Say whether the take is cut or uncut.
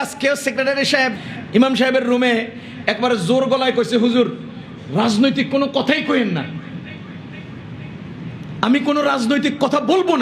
cut